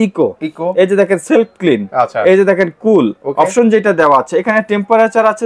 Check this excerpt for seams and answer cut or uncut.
uncut